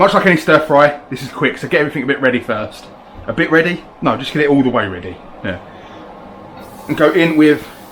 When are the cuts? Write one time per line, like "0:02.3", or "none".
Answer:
none